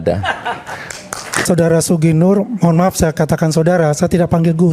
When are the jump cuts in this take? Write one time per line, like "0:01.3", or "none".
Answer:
0:01.5